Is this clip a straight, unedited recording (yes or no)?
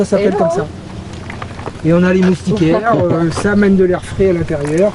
yes